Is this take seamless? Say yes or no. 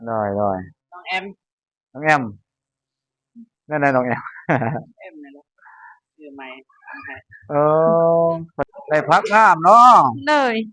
no